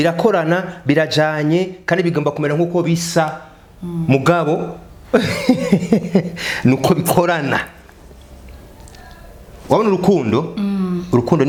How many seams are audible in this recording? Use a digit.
0